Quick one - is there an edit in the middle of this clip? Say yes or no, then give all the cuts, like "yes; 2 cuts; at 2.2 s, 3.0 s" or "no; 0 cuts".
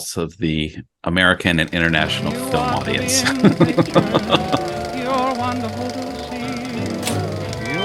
yes; 1 cut; at 4.5 s